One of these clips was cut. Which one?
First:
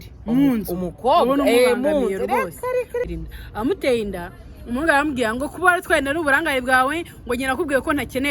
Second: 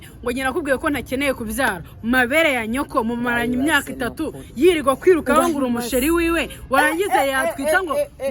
first; 1 cut; at 3.1 s

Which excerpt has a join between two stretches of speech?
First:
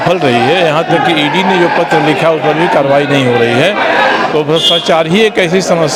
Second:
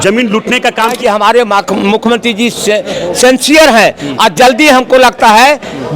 second; 1 cut; at 1.0 s

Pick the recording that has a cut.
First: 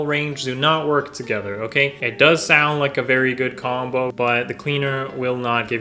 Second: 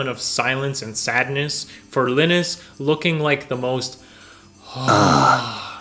first; 2 cuts; at 2.0 s, 4.1 s

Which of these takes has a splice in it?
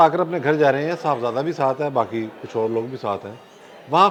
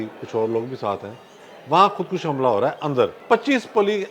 second; 1 cut; at 3.2 s

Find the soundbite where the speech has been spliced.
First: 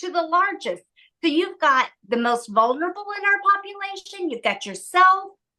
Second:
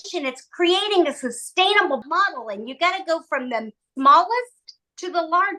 second; 2 cuts; at 2.0 s, 3.8 s

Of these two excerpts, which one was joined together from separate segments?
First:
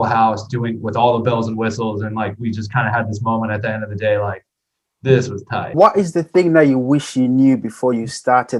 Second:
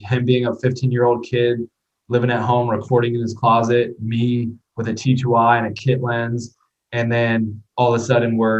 first; 1 cut; at 5.7 s

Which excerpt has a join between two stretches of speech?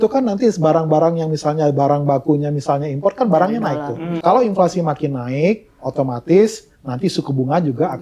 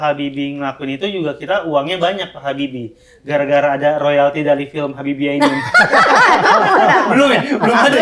first; 1 cut; at 4.2 s

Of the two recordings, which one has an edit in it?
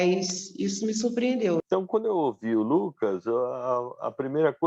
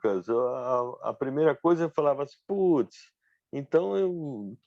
first; 1 cut; at 1.6 s

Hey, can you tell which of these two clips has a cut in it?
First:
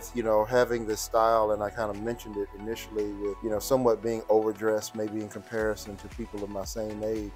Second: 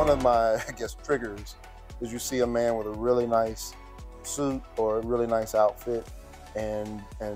first; 1 cut; at 3.4 s

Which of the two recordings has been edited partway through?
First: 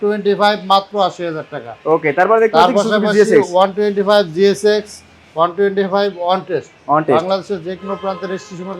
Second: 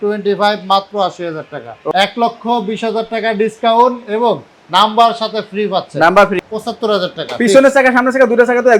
second; 2 cuts; at 1.8 s, 6.3 s

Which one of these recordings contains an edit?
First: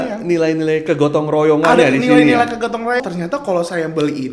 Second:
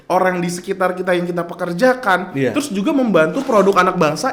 first; 1 cut; at 3.0 s

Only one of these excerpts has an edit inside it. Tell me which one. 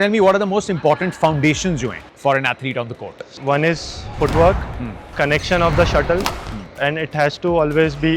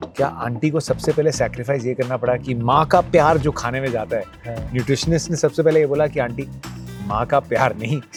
first; 3 cuts; at 2.0 s, 3.3 s, 5.1 s

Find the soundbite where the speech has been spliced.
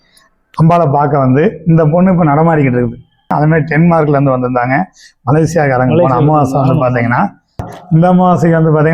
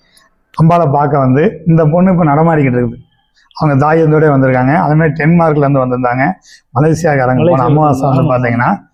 first; 2 cuts; at 3.3 s, 7.7 s

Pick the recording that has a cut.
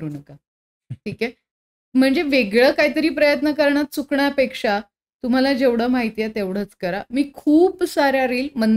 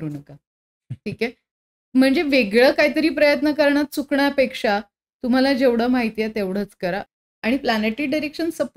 second; 1 cut; at 7.0 s

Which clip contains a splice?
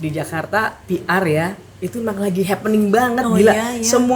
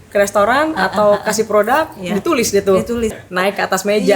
second; 1 cut; at 3.2 s

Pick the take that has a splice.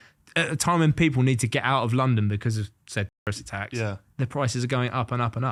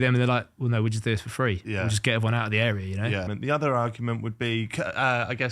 second; 1 cut; at 3.3 s

